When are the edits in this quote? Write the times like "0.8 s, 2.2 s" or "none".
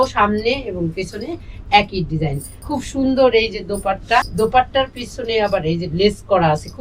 2.5 s, 4.3 s